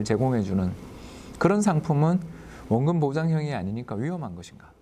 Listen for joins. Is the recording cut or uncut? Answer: uncut